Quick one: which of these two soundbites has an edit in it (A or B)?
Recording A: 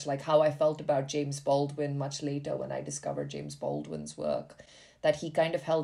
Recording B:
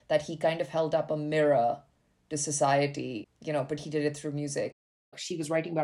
B